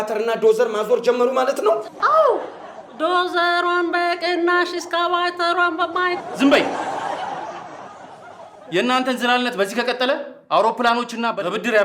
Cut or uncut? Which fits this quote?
cut